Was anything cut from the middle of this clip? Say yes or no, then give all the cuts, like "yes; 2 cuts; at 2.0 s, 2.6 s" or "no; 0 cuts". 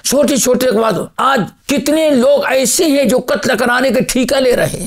yes; 1 cut; at 1.6 s